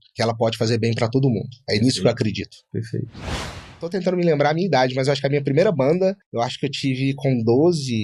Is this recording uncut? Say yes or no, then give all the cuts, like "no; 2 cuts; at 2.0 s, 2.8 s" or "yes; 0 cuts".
no; 1 cut; at 3.6 s